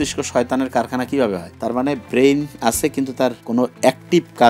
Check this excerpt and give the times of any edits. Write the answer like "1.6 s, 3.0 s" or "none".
2.0 s, 3.7 s